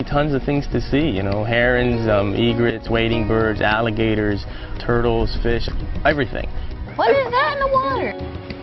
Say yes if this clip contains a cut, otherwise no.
yes